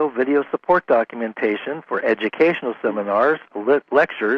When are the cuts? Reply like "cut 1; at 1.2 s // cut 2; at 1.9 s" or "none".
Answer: cut 1; at 2.3 s